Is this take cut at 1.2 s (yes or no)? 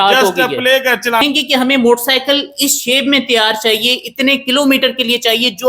yes